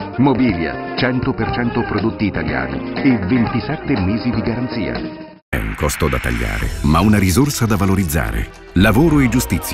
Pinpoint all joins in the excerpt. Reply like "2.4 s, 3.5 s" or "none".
5.5 s